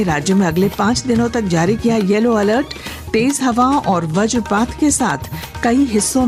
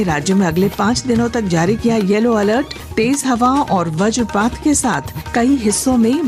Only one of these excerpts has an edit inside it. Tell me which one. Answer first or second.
second